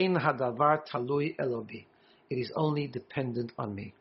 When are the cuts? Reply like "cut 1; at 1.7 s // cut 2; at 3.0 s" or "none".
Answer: none